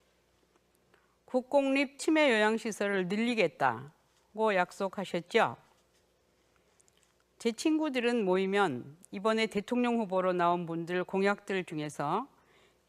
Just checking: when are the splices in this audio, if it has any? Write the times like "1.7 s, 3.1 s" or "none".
8.4 s